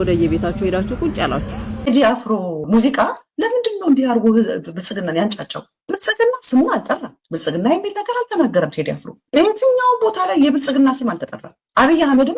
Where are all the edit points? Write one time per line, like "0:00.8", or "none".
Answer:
0:01.8